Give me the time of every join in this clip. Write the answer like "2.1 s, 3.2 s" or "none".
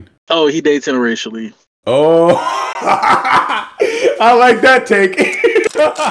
none